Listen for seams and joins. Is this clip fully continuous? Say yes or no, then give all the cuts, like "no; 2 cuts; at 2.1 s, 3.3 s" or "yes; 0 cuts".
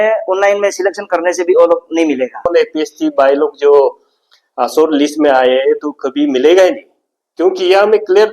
no; 1 cut; at 2.5 s